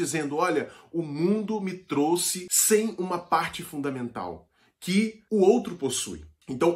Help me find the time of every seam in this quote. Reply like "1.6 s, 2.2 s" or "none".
2.4 s